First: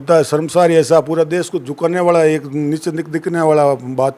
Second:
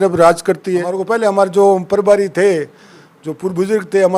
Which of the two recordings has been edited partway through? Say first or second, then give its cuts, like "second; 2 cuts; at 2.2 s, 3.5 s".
second; 1 cut; at 0.9 s